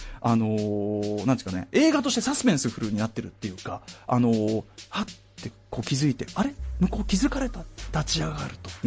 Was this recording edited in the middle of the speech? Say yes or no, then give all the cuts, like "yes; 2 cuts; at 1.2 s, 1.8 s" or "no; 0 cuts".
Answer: yes; 1 cut; at 3.7 s